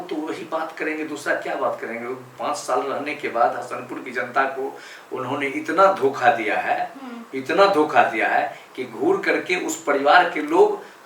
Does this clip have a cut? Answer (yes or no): no